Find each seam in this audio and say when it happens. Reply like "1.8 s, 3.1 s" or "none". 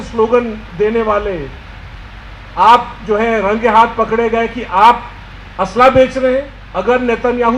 6.6 s